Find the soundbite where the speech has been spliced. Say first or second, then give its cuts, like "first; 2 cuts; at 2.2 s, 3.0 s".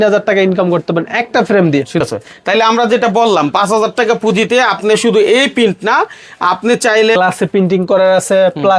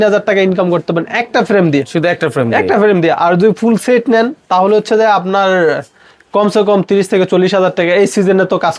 first; 2 cuts; at 2.0 s, 7.2 s